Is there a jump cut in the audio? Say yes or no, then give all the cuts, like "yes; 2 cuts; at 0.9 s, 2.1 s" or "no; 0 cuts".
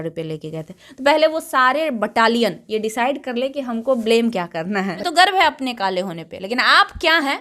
yes; 1 cut; at 5.0 s